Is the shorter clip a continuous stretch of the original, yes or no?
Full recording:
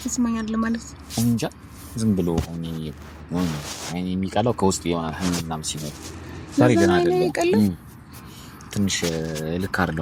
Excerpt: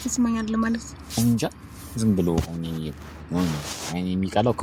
yes